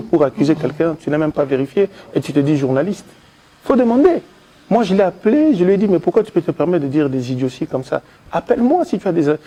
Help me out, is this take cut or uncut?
uncut